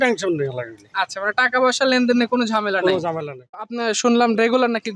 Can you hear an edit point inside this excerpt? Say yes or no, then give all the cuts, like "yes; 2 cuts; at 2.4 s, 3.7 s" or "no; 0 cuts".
yes; 1 cut; at 3.6 s